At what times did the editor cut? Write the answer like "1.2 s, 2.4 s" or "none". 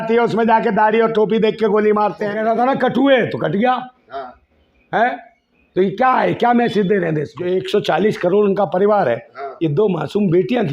2.4 s, 7.3 s